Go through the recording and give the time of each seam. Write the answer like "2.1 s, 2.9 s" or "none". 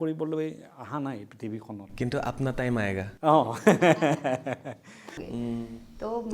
5.2 s